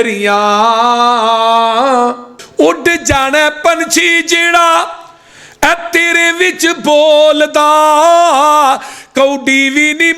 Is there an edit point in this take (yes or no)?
yes